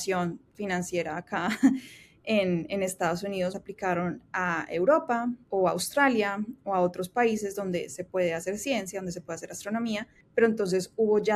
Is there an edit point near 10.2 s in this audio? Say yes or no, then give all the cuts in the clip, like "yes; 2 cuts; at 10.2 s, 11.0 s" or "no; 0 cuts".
yes; 3 cuts; at 3.5 s, 5.4 s, 10.2 s